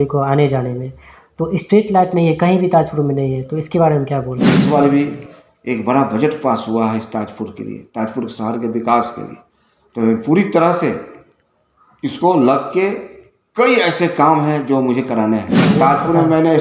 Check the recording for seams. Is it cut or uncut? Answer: cut